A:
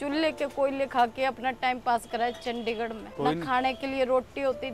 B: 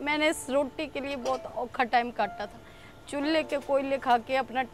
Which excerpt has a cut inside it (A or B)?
A